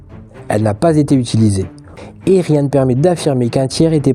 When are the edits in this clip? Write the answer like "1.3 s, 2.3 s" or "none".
2.0 s